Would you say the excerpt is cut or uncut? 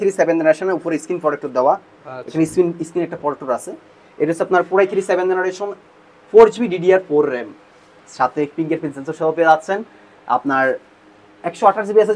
uncut